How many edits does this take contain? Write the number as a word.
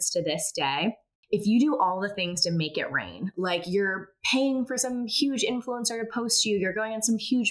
one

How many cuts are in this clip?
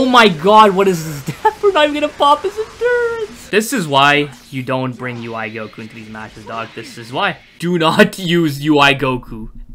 two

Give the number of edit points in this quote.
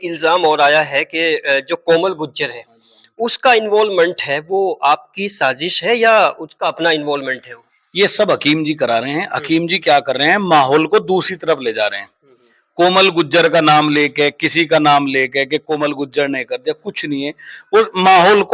zero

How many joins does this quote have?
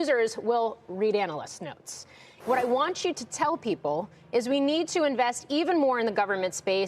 one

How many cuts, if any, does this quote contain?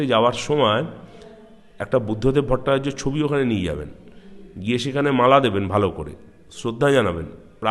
zero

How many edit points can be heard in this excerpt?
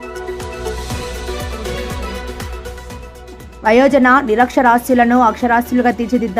one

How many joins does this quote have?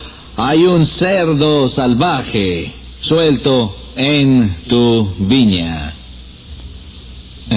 one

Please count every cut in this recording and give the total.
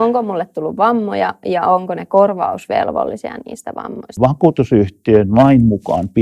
one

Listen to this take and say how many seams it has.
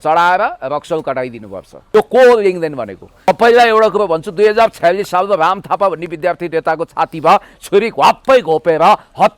two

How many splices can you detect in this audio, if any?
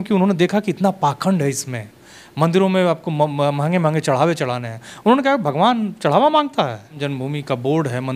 one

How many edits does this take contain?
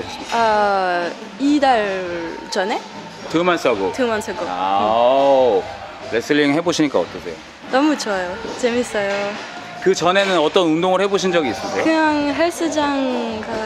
zero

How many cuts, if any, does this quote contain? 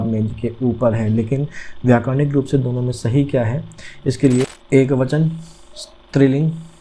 one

